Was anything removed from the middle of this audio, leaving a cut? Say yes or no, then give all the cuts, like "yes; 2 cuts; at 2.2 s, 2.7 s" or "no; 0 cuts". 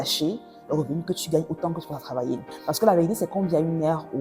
yes; 1 cut; at 2.5 s